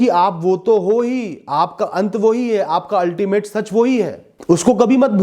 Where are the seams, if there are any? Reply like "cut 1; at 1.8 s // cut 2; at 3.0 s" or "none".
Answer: cut 1; at 4.3 s

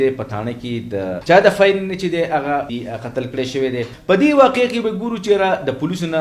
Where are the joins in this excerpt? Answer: cut 1; at 1.2 s // cut 2; at 2.7 s // cut 3; at 3.9 s

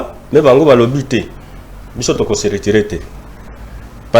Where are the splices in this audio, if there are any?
none

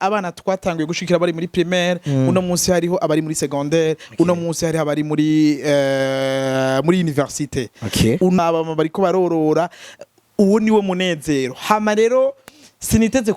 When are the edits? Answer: cut 1; at 8.4 s

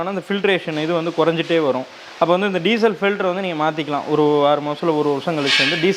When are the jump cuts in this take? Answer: none

